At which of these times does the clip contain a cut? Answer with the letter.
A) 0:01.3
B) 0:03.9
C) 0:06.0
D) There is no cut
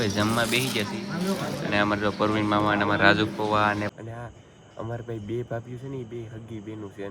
B